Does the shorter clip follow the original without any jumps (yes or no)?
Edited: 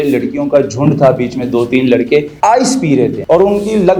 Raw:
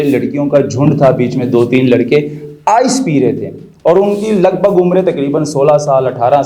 no